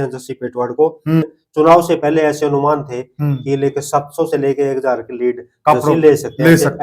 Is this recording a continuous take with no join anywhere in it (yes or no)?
no